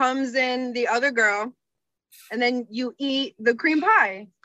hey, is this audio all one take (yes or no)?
yes